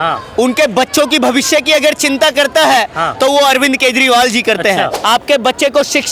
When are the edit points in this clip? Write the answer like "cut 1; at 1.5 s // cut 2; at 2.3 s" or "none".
cut 1; at 5.0 s